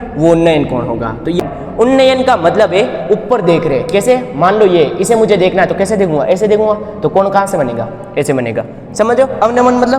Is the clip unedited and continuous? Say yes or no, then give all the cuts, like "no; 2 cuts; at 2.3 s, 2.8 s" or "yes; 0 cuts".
no; 1 cut; at 1.4 s